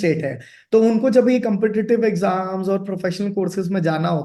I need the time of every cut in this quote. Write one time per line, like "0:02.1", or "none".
none

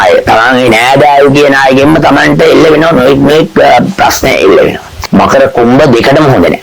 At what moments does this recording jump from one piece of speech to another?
0:04.9

